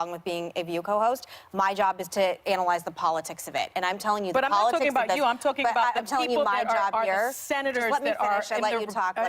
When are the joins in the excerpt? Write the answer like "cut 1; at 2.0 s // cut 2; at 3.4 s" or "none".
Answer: cut 1; at 1.4 s